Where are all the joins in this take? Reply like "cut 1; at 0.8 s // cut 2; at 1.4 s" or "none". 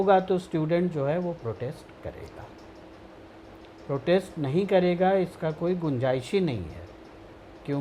none